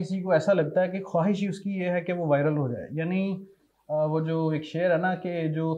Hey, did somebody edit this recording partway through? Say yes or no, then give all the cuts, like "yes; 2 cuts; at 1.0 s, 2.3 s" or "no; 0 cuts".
no; 0 cuts